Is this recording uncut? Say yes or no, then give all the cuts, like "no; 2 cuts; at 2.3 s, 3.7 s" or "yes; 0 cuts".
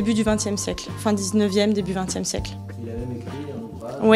yes; 0 cuts